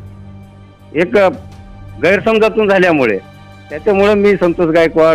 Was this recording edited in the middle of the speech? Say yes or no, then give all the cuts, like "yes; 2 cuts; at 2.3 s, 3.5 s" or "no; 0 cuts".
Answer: no; 0 cuts